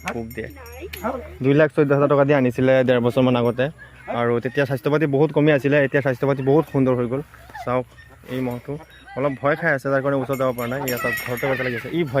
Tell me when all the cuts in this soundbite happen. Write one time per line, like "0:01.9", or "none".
0:01.2